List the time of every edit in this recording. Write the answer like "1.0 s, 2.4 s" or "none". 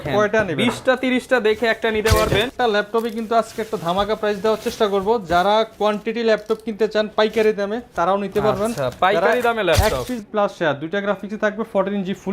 2.5 s, 10.2 s